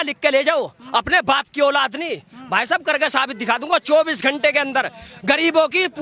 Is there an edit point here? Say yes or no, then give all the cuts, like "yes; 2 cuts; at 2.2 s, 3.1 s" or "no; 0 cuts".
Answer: no; 0 cuts